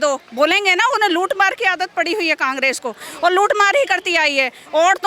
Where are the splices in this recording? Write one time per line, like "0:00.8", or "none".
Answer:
none